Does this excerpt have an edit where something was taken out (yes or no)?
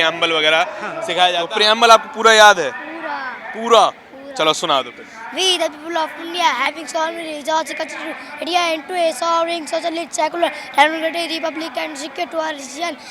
yes